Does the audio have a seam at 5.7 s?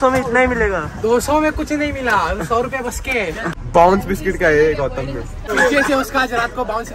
no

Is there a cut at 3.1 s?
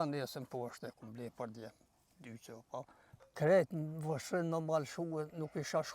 yes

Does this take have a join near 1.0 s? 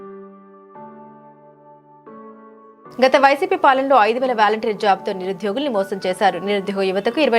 no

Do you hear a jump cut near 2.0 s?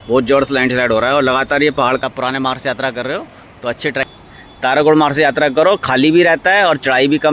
yes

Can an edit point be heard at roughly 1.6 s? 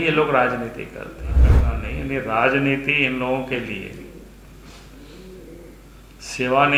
yes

